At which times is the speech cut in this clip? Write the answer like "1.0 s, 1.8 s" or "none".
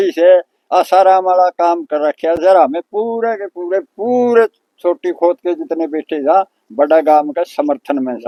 none